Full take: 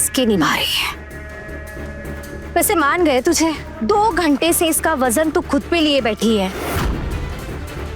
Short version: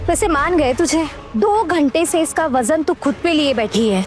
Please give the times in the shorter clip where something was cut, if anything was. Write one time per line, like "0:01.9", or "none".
none